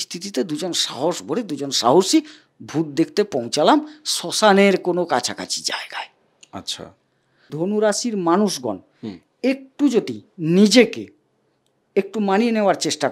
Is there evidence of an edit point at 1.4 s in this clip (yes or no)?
no